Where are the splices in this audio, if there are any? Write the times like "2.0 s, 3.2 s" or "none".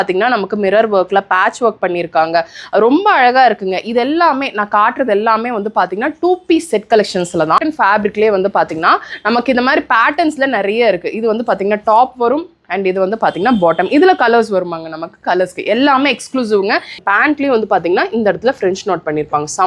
7.6 s, 17.0 s